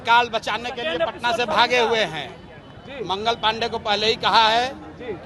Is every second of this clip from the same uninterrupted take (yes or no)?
yes